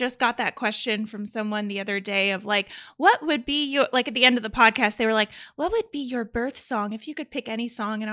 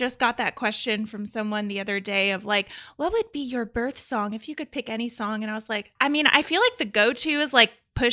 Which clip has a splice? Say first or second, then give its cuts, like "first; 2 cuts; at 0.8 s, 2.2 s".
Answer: second; 2 cuts; at 2.8 s, 5.9 s